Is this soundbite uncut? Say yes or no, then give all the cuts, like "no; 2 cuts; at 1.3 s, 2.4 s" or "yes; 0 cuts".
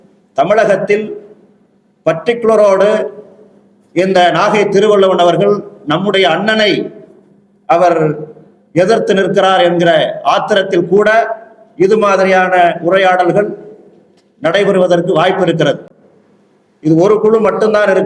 yes; 0 cuts